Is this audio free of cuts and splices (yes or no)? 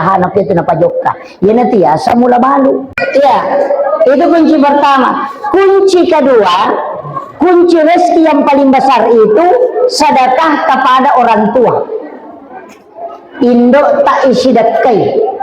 no